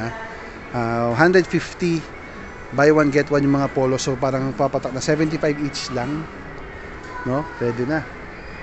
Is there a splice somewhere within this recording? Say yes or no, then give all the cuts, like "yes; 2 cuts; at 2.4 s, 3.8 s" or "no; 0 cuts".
no; 0 cuts